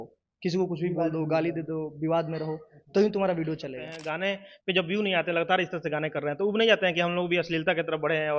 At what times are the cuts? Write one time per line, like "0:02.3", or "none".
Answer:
0:04.0